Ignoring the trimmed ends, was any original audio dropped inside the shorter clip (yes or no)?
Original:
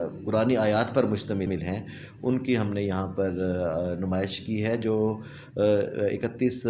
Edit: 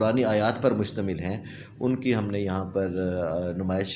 yes